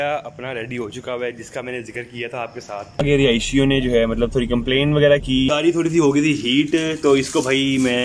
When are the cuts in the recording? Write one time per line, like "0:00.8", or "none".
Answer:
0:03.0
0:05.5